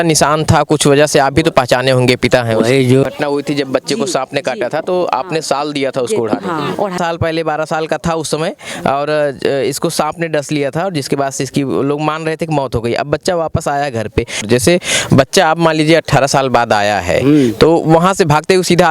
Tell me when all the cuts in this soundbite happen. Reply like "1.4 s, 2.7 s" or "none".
3.0 s, 7.0 s, 14.4 s